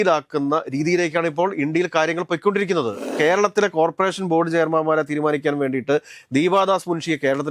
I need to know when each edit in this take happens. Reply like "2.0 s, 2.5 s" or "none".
3.1 s